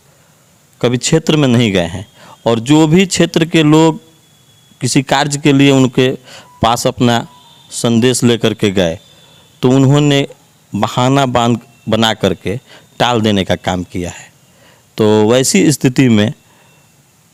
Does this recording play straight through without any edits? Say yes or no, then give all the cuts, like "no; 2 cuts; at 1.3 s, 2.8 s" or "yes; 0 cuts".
yes; 0 cuts